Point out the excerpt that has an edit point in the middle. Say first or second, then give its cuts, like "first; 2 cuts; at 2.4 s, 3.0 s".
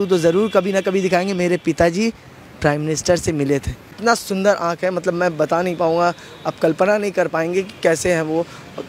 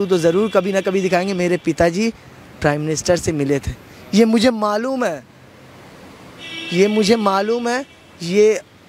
first; 1 cut; at 3.9 s